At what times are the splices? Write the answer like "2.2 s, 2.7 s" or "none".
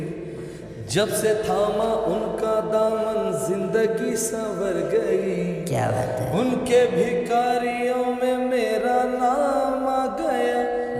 none